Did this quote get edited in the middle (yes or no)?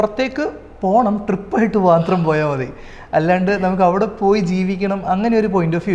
no